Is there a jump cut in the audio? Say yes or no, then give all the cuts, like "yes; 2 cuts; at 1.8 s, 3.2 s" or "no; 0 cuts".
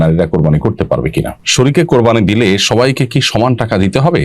yes; 1 cut; at 1.3 s